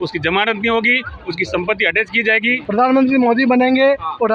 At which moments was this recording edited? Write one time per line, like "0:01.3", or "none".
0:02.6